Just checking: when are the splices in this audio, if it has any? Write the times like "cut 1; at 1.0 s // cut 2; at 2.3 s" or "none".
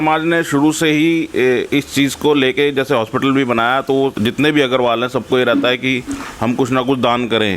cut 1; at 4.1 s